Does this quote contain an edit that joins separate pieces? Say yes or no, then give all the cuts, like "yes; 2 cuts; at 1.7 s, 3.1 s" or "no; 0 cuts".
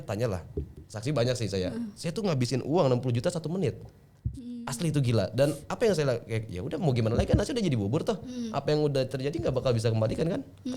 no; 0 cuts